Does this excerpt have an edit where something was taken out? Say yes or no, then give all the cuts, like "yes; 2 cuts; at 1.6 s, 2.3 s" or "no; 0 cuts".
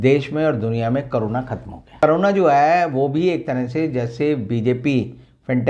yes; 1 cut; at 2.0 s